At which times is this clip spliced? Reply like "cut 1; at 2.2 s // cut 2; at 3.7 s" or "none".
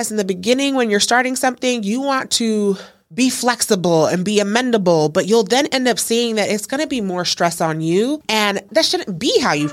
cut 1; at 3.0 s // cut 2; at 8.7 s